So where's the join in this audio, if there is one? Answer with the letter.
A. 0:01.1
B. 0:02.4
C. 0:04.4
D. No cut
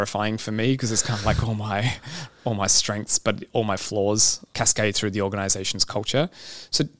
C